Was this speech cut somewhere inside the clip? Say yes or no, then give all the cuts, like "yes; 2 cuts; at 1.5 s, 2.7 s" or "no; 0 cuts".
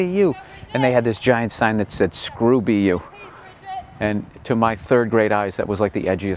yes; 1 cut; at 2.2 s